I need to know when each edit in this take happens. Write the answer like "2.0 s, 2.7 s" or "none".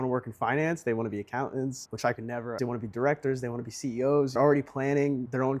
2.6 s

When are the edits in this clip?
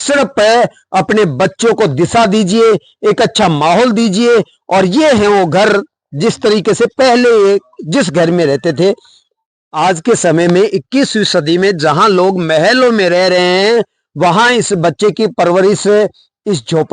none

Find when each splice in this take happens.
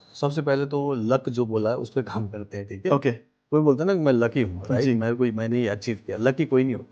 none

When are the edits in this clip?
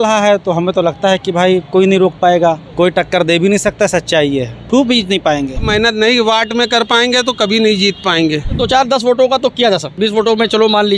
2.7 s, 4.5 s, 5.7 s, 8.6 s, 9.9 s

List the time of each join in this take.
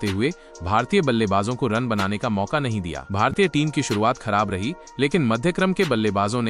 3.0 s

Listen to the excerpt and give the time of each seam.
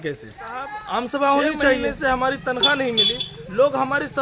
1.9 s

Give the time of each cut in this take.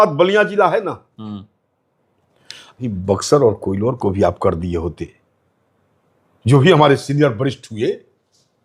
2.9 s

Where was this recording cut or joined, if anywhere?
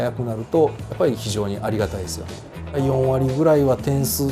2.7 s

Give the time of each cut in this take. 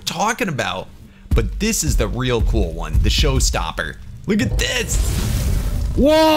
1.0 s

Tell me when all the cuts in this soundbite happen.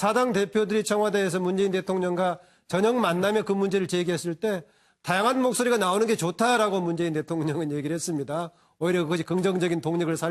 1.3 s

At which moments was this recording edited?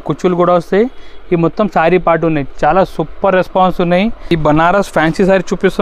4.3 s

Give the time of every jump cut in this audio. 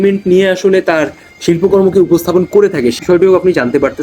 3.0 s

